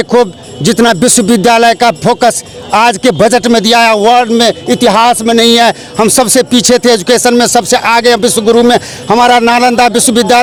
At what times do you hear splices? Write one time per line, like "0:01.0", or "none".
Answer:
none